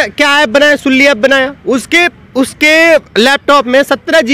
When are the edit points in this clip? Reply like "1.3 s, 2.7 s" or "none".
none